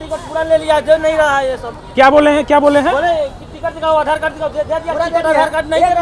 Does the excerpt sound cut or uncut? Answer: uncut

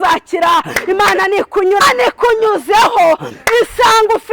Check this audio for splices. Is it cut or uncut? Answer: cut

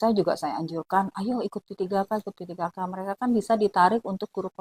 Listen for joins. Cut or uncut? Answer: uncut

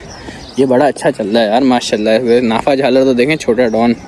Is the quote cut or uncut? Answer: uncut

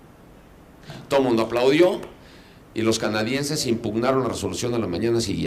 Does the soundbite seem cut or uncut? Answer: cut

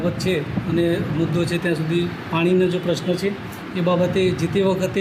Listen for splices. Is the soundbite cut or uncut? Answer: uncut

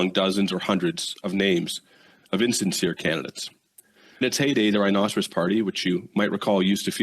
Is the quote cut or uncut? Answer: cut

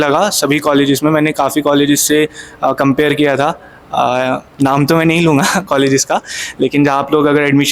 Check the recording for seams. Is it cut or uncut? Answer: cut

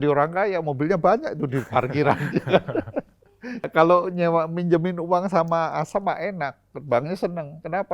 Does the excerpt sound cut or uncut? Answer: cut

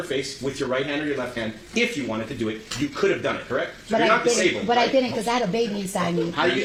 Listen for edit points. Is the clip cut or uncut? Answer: uncut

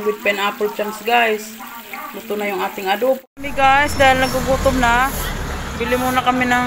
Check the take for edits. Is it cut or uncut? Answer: cut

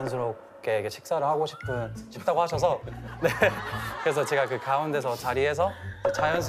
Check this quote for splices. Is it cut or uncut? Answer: uncut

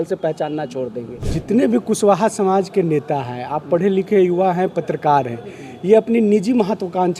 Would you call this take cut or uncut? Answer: cut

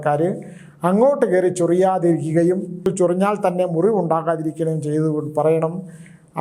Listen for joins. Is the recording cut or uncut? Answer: cut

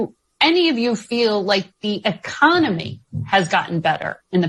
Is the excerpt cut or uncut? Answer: uncut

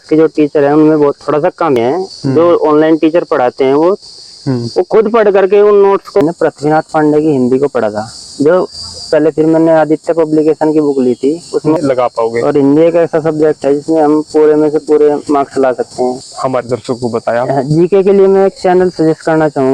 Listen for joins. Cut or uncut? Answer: cut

